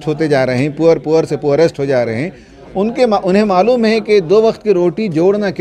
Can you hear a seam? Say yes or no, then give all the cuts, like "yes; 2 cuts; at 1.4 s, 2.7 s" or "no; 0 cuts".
yes; 1 cut; at 2.5 s